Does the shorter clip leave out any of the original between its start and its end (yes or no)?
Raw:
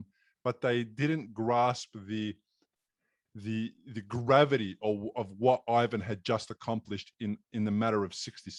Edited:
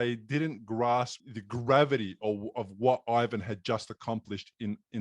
yes